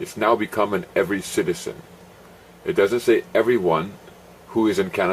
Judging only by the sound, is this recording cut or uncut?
cut